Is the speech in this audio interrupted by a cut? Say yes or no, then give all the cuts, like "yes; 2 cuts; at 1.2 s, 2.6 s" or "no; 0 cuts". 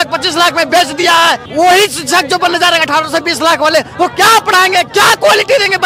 yes; 1 cut; at 1.4 s